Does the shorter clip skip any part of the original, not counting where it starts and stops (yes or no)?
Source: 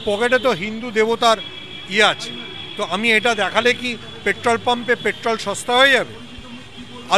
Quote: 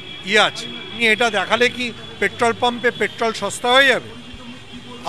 yes